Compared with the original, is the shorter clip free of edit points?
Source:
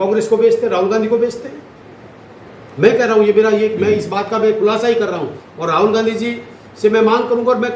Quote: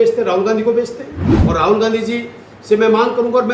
no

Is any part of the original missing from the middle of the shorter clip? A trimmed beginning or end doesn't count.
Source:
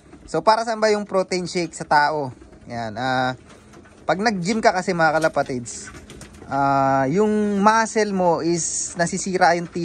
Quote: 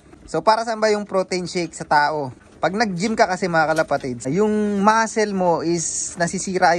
yes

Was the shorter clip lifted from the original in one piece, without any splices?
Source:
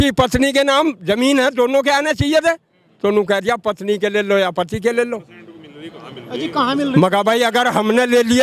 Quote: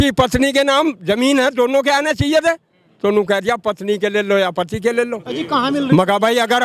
no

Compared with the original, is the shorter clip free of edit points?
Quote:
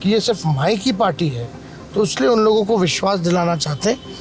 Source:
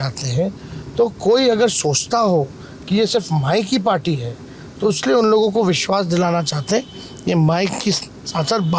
yes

